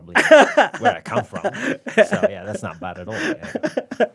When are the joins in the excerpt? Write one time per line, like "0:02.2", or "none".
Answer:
none